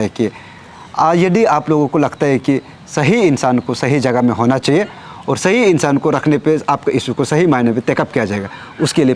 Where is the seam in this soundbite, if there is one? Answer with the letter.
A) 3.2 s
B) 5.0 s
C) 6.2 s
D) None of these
D